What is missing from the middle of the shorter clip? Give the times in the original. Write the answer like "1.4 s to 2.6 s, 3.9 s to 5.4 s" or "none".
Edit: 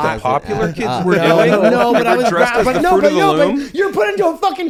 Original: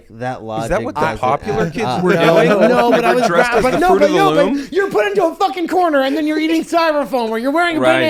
none